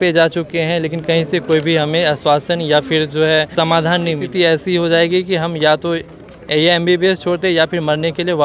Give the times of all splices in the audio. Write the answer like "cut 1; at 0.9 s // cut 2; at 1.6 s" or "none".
cut 1; at 4.2 s